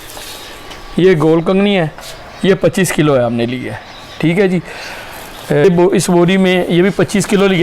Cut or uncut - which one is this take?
cut